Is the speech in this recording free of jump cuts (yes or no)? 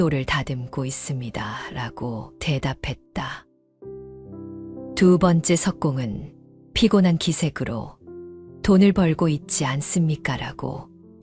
yes